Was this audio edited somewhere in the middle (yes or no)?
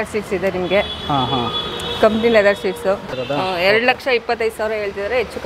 yes